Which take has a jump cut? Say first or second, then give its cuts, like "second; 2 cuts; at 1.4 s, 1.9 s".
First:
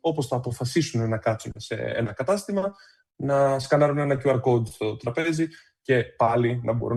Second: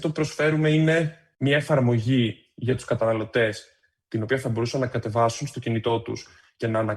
second; 1 cut; at 1.2 s